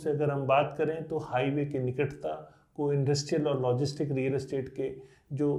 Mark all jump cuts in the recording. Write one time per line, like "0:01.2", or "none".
none